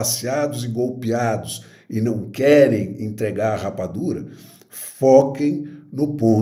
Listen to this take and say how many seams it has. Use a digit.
0